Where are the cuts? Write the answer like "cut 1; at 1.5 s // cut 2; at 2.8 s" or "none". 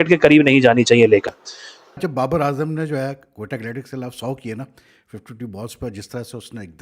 cut 1; at 2.0 s